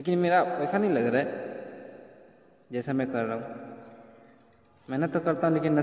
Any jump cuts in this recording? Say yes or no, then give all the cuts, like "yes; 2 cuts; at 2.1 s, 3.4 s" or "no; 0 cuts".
no; 0 cuts